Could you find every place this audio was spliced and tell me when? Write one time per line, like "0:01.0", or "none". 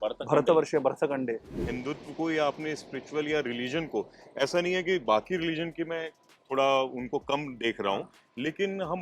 0:01.7

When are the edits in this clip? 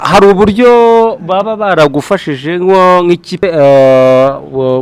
0:03.4

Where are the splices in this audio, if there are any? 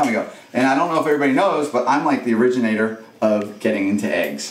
none

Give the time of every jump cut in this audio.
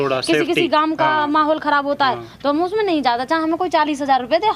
none

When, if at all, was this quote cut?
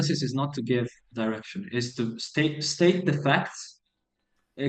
none

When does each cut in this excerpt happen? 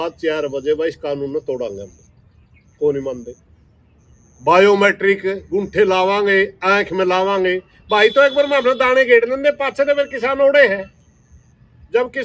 none

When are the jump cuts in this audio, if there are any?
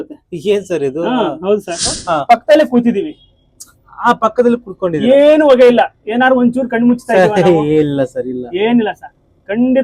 0:02.0

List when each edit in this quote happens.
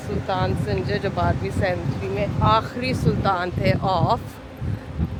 none

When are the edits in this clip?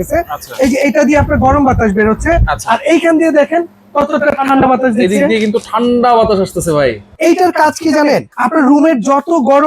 0:07.1
0:08.3

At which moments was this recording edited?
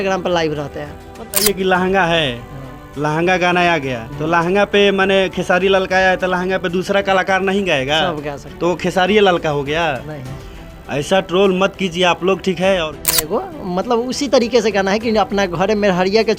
0:01.3
0:13.1

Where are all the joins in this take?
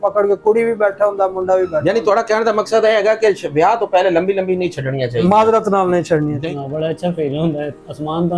0:06.4

